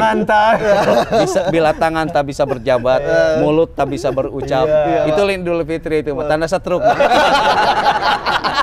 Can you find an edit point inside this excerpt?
no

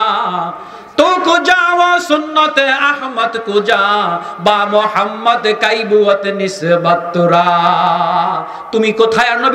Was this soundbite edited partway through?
no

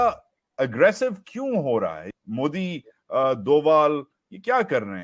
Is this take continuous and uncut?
no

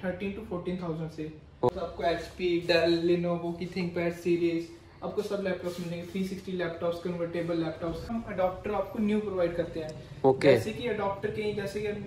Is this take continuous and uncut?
no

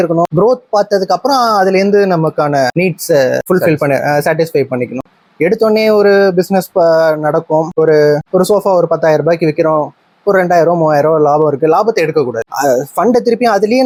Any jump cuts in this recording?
no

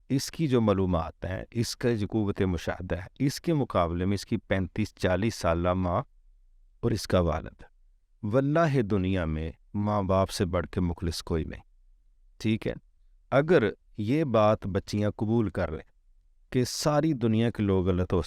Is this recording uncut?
yes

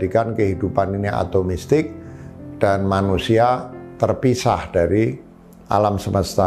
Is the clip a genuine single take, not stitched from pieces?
yes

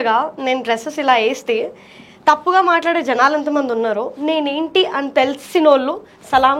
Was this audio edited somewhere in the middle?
no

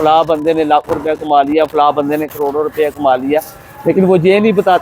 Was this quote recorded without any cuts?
yes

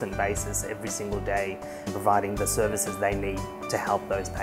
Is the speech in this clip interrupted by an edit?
yes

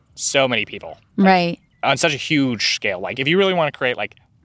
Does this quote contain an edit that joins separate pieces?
no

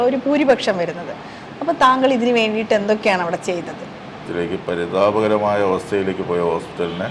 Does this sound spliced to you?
yes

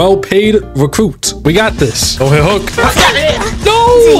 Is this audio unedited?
no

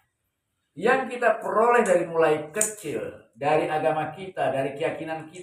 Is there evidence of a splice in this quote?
no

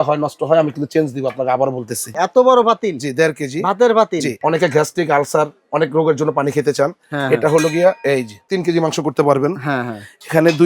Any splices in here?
yes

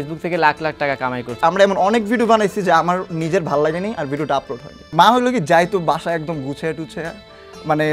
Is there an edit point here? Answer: yes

